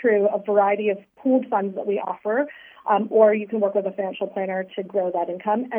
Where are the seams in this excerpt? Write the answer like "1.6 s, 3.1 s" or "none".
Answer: none